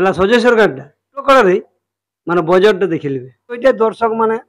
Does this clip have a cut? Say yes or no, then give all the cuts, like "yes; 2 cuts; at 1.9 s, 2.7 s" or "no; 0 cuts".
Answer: yes; 2 cuts; at 1.2 s, 3.6 s